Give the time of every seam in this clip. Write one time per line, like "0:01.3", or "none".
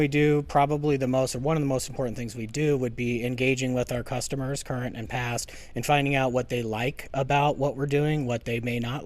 none